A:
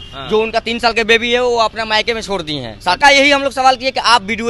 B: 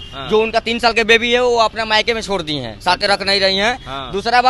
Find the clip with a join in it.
A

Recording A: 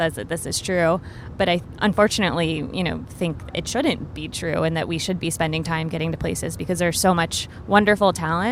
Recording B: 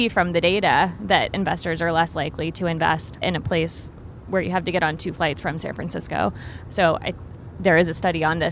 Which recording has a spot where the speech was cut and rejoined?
B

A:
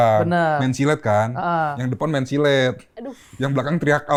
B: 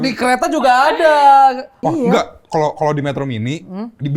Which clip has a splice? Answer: B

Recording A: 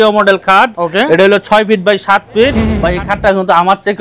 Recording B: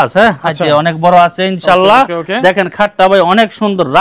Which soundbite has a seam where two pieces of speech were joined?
A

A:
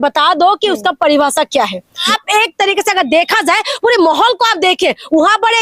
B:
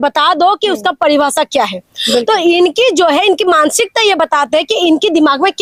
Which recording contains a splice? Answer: A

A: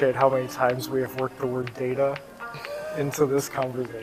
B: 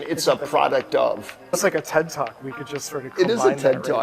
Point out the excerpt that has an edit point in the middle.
B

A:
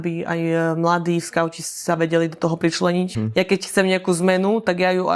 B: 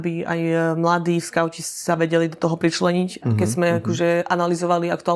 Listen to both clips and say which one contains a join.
A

